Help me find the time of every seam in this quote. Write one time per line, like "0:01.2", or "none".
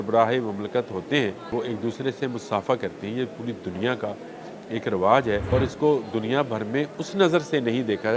0:01.5
0:05.4

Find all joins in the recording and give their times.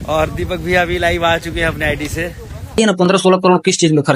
0:02.8

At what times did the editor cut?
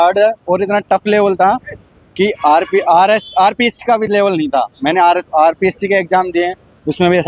none

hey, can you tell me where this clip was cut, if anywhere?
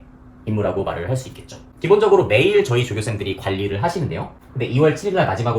0:01.6
0:04.4

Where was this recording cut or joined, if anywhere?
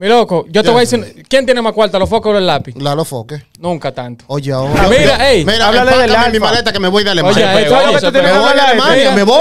0:04.8

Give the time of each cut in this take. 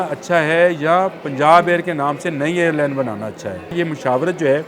0:03.7

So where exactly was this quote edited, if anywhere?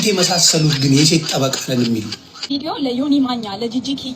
0:02.5

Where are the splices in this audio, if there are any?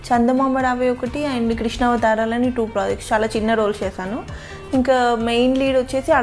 none

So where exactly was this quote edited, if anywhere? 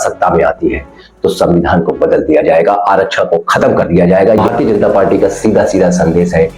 0:04.4

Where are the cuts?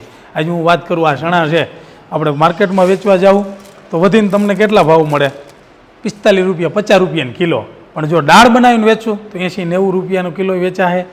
none

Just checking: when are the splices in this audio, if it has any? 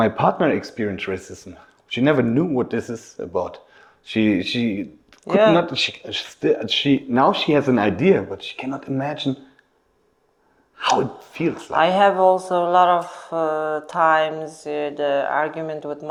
none

